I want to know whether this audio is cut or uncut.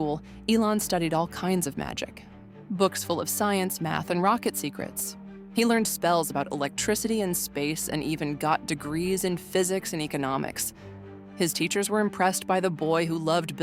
uncut